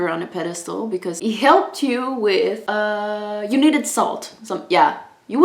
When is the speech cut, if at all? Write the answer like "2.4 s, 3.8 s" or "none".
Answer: 1.2 s, 2.6 s